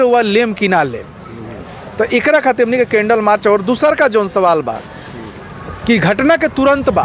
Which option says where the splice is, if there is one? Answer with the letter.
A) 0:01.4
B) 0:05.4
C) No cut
C